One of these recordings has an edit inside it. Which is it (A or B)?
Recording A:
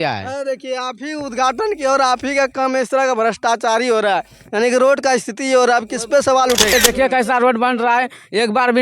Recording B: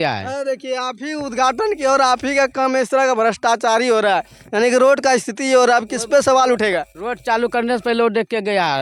A